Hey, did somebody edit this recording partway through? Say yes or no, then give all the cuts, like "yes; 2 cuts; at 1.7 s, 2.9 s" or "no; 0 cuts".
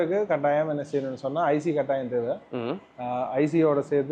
no; 0 cuts